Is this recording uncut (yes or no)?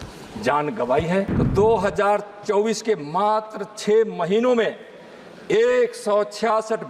no